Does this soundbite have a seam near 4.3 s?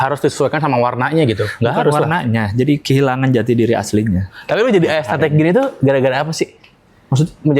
yes; 1 cut; at 4.3 s

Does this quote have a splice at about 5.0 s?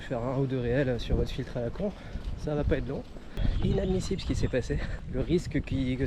yes; 2 cuts; at 3.4 s, 5.0 s

